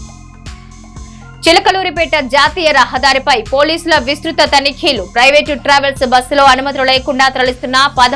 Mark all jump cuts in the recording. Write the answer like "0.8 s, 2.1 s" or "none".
1.1 s